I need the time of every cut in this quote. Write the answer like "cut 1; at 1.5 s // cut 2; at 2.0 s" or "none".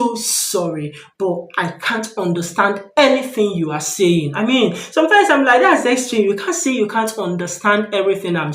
none